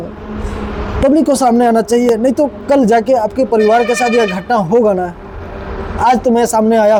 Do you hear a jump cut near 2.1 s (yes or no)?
no